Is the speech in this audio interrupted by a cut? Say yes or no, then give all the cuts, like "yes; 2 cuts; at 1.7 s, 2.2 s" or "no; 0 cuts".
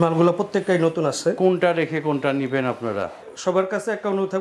yes; 1 cut; at 3.3 s